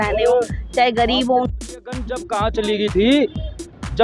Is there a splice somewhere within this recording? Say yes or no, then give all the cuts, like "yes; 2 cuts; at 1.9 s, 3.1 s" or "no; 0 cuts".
yes; 1 cut; at 1.5 s